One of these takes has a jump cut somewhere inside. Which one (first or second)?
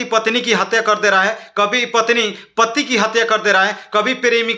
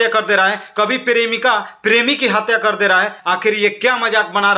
second